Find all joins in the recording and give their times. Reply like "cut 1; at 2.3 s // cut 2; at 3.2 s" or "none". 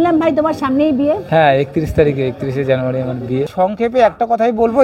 cut 1; at 3.5 s